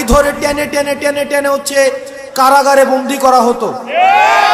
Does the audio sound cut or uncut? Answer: uncut